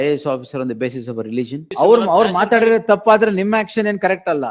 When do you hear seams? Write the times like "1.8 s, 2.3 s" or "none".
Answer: 1.7 s